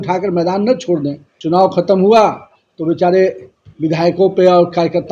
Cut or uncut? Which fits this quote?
cut